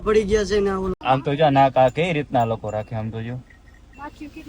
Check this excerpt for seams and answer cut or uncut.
cut